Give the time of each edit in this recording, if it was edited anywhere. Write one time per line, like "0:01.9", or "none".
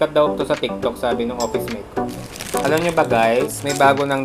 0:02.0